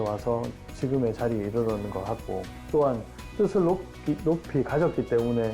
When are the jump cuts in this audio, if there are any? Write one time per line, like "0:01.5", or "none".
0:02.5

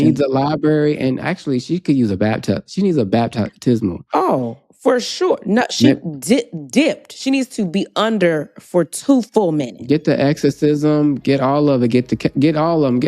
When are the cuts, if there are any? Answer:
none

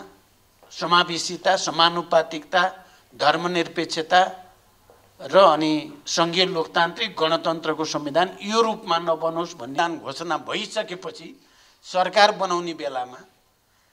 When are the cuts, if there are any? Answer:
0:09.8

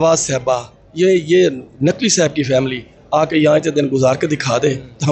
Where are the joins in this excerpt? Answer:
none

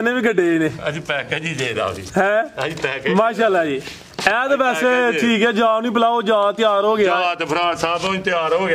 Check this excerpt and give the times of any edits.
none

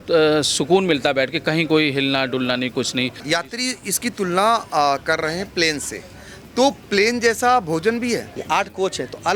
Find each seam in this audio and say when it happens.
0:03.2
0:08.4

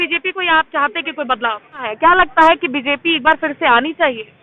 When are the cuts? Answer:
0:01.9

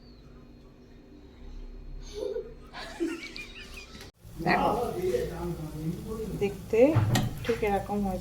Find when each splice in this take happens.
0:04.1

